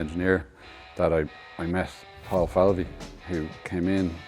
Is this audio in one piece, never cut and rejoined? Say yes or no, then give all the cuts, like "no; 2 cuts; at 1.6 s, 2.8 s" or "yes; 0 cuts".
no; 1 cut; at 1.4 s